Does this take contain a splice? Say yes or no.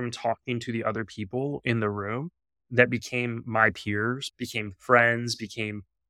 yes